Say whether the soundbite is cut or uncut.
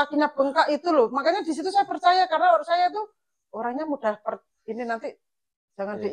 uncut